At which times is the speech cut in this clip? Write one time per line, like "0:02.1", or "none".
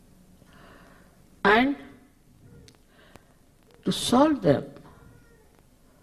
0:04.0